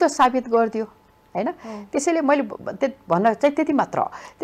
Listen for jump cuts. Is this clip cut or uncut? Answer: uncut